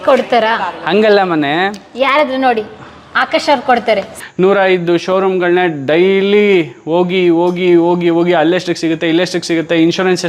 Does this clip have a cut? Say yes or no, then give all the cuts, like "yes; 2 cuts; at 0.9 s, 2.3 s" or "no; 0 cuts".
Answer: yes; 1 cut; at 4.2 s